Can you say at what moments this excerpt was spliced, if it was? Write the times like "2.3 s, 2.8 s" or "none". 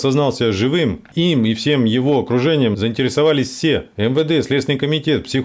1.0 s, 2.8 s, 3.9 s